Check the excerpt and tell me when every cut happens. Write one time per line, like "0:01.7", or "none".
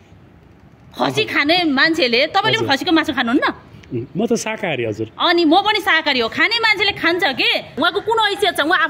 0:07.8